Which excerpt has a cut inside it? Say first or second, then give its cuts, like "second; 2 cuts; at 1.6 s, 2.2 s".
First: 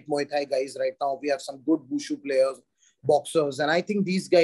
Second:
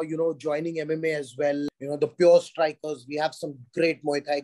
second; 1 cut; at 1.7 s